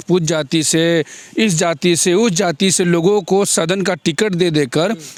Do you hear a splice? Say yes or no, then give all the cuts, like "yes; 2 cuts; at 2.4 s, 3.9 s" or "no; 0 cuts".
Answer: no; 0 cuts